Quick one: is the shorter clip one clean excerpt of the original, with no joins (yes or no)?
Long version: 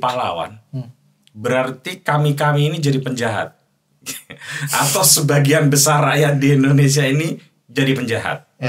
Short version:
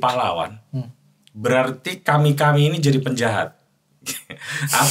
yes